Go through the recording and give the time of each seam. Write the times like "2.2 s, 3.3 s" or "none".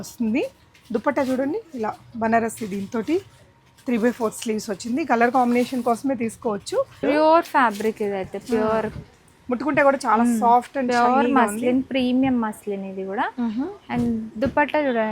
7.0 s